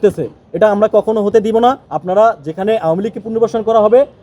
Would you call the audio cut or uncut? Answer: cut